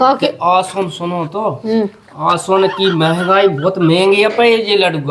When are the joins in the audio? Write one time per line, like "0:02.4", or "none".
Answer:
none